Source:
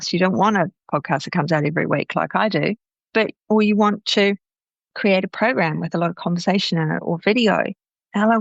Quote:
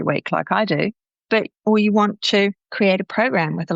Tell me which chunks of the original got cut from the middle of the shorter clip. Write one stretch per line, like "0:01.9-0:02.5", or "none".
0:04.5-0:04.9